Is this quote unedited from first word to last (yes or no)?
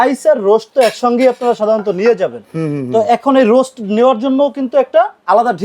yes